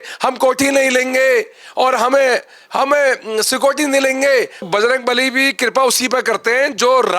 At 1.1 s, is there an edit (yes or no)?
no